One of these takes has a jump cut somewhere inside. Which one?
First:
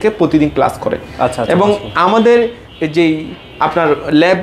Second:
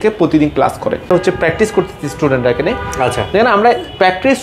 second; 1 cut; at 1.1 s

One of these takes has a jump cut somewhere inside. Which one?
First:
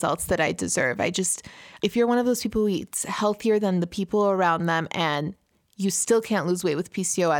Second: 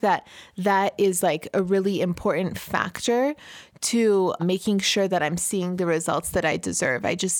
second; 1 cut; at 4.4 s

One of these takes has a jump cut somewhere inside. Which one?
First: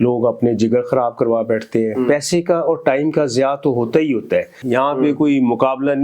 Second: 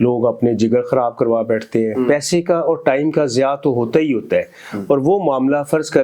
first; 1 cut; at 4.6 s

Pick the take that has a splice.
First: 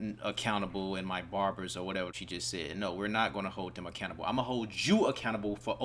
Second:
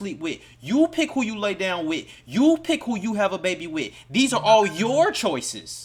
first; 1 cut; at 2.2 s

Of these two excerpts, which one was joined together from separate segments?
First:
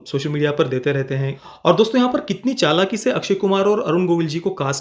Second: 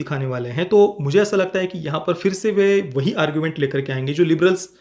first; 1 cut; at 1.3 s

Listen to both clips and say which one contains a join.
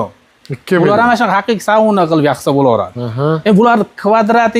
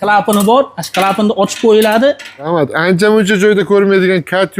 second; 1 cut; at 2.5 s

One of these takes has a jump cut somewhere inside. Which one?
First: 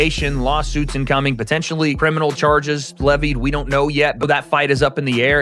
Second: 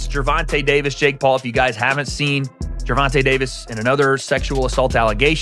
first; 1 cut; at 4.2 s

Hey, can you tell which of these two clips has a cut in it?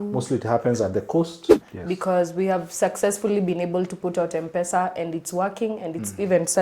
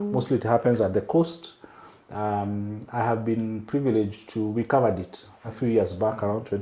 first; 1 cut; at 1.7 s

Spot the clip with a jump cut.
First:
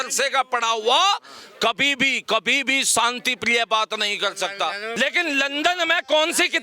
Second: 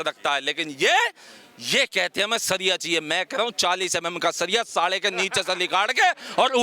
first; 1 cut; at 4.9 s

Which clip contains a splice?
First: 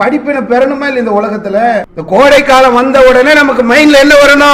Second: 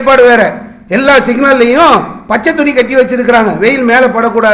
first; 1 cut; at 1.9 s

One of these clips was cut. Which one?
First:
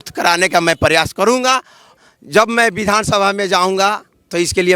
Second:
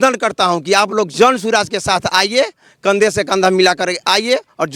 first; 1 cut; at 1.9 s

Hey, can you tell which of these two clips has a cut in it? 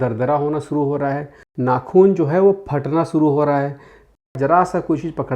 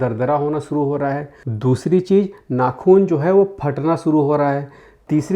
first; 2 cuts; at 1.5 s, 4.3 s

